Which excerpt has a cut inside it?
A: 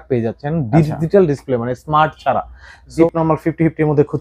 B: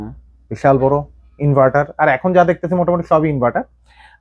A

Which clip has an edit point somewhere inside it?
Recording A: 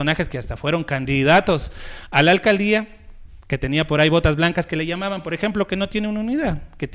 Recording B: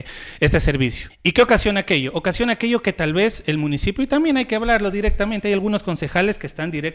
B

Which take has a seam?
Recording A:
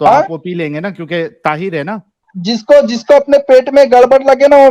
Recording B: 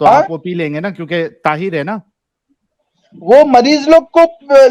A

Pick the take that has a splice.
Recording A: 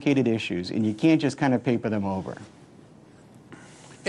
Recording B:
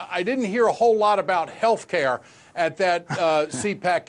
A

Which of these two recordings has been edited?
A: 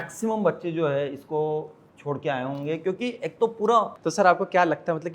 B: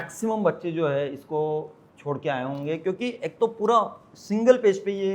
A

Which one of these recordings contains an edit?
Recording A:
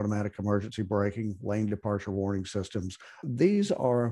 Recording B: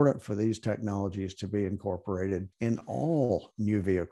B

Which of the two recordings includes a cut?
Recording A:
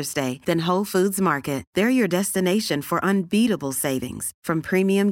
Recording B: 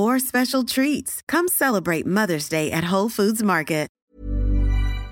B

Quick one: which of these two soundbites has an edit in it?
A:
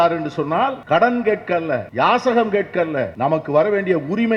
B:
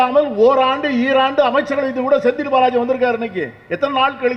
A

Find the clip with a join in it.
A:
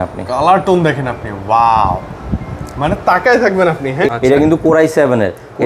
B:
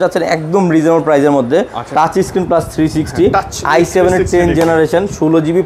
A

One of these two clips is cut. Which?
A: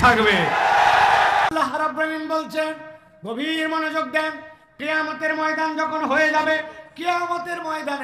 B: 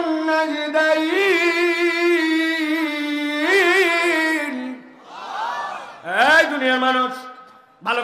A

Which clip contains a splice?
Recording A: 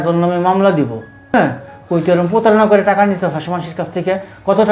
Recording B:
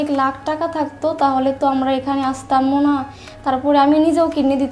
A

